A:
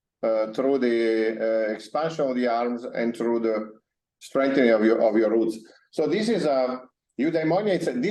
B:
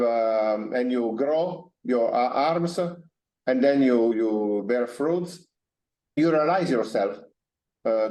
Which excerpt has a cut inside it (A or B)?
B